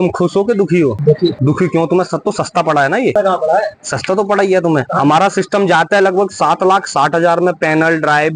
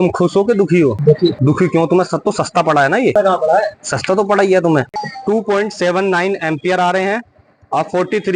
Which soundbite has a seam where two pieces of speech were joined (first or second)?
second